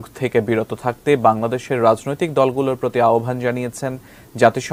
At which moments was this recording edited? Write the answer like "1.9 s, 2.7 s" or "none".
none